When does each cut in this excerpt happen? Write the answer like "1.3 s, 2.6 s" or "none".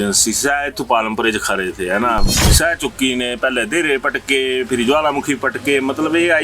2.4 s